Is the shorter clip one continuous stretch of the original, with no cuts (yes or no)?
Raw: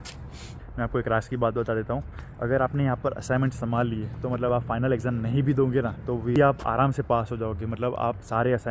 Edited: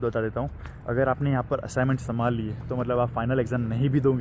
yes